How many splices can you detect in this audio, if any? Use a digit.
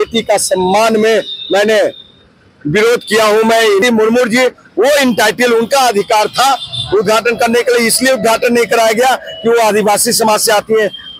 1